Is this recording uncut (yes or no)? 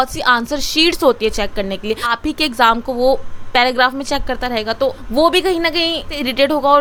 yes